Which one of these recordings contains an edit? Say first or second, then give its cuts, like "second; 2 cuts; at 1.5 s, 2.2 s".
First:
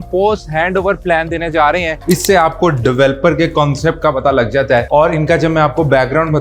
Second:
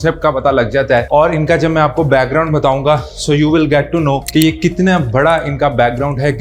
first; 1 cut; at 2.0 s